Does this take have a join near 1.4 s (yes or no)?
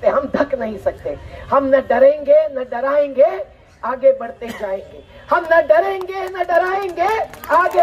no